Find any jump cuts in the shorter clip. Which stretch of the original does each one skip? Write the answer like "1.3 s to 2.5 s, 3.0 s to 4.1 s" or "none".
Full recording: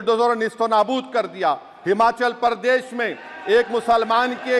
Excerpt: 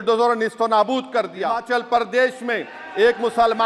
1.6 s to 2.1 s